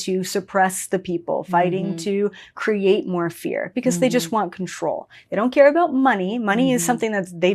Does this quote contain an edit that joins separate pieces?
no; 0 cuts

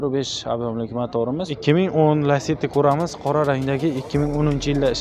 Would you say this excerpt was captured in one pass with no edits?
no; 1 cut; at 1.5 s

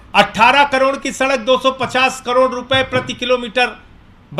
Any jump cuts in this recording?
no; 0 cuts

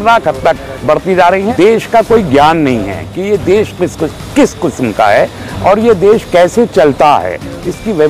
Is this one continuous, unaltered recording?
no; 1 cut; at 1.5 s

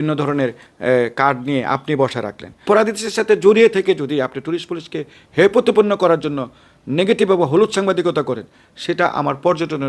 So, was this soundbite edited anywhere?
yes; 1 cut; at 2.7 s

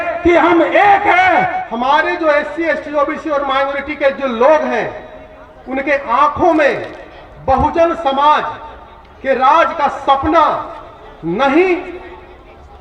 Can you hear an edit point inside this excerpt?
yes; 1 cut; at 1.6 s

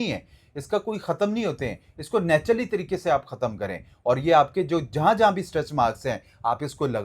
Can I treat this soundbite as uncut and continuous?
yes; 0 cuts

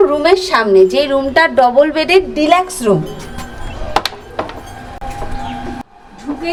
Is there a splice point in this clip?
no; 0 cuts

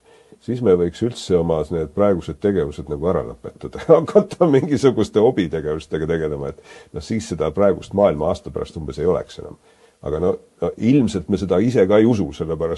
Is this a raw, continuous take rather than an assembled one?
yes; 0 cuts

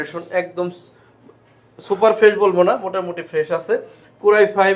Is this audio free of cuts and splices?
yes; 0 cuts

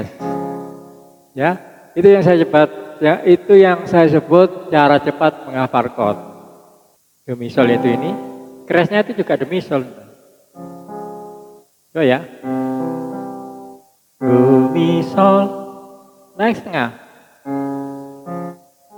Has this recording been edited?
no; 0 cuts

